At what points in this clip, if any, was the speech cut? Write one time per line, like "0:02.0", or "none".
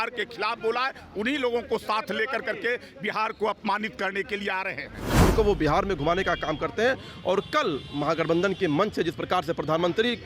0:05.3